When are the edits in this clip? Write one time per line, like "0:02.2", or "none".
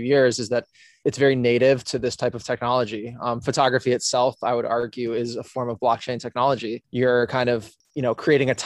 0:01.0
0:06.8